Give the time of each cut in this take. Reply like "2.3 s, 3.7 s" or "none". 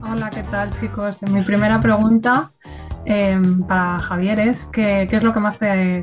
none

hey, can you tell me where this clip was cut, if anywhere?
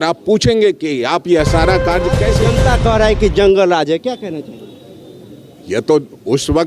2.4 s

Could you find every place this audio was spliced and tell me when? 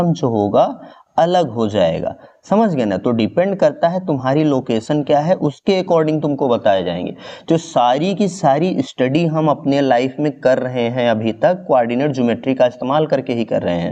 none

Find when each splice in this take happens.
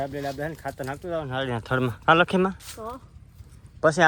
none

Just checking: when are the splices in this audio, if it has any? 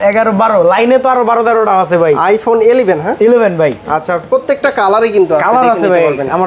none

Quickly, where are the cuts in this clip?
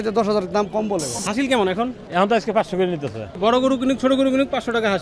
1.2 s, 2.0 s, 3.4 s

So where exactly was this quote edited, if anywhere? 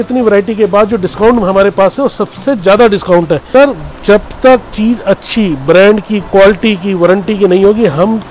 3.4 s

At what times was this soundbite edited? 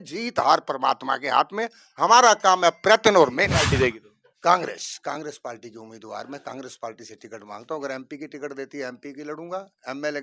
3.7 s

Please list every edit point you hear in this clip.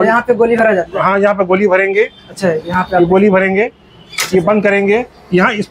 none

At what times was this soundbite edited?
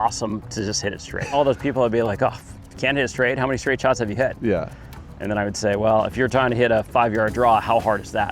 1.3 s

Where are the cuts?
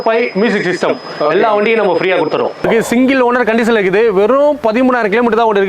2.7 s

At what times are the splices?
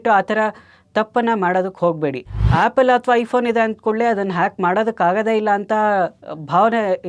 2.4 s

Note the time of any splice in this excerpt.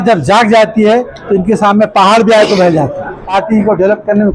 3.3 s

